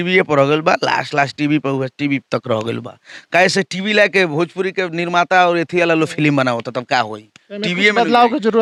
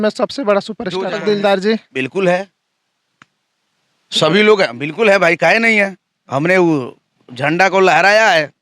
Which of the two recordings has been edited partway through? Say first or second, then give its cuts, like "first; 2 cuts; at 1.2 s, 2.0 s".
second; 1 cut; at 1.1 s